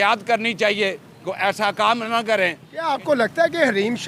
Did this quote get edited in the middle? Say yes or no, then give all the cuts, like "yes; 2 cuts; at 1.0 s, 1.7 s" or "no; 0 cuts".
yes; 1 cut; at 2.8 s